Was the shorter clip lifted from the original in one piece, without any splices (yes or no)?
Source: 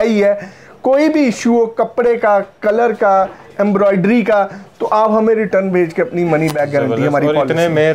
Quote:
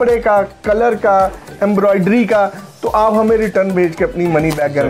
yes